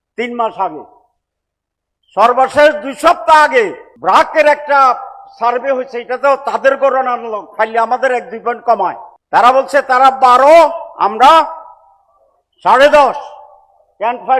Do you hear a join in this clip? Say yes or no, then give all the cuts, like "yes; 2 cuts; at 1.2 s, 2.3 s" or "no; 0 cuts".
yes; 2 cuts; at 3.9 s, 9.1 s